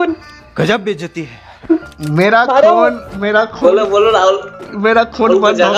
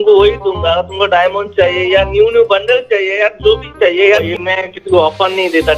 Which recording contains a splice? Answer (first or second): second